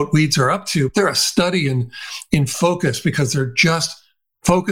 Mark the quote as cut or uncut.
cut